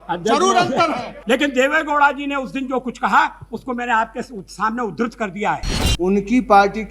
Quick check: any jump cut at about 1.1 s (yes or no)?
yes